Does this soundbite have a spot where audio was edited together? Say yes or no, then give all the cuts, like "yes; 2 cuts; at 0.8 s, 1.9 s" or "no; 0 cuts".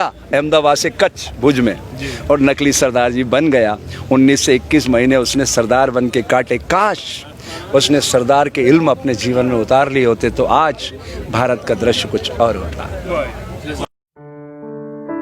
yes; 1 cut; at 13.8 s